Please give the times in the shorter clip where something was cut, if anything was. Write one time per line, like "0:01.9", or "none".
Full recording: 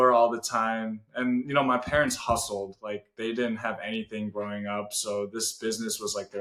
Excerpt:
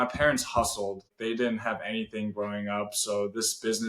0:01.1

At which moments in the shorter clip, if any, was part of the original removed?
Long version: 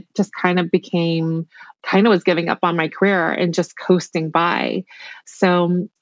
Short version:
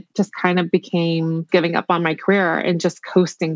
0:01.5

